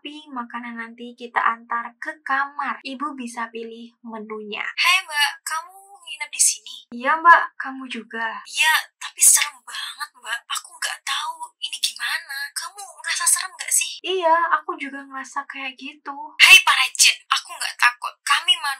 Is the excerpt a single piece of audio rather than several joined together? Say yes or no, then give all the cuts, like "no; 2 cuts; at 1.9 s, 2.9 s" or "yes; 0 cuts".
no; 2 cuts; at 4.7 s, 16.4 s